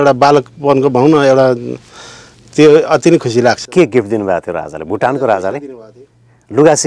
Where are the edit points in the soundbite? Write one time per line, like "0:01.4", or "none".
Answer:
none